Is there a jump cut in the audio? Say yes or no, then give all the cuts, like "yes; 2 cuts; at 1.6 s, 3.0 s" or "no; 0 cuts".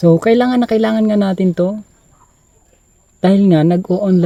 no; 0 cuts